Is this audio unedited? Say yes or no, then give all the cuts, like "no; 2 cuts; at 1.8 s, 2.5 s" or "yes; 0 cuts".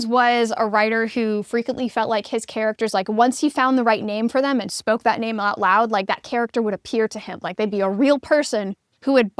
yes; 0 cuts